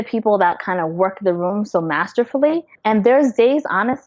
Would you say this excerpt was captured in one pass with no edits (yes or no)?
no